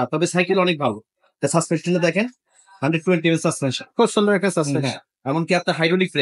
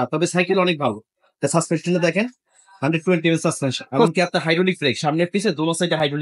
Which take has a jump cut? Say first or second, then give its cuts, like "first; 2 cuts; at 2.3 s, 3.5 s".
second; 1 cut; at 4.1 s